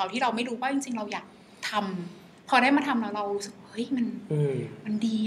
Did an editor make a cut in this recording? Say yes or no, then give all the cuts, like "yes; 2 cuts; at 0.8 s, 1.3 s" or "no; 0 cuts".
no; 0 cuts